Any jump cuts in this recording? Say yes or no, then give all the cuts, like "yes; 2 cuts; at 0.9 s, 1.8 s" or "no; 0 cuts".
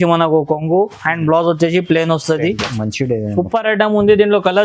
yes; 1 cut; at 2.6 s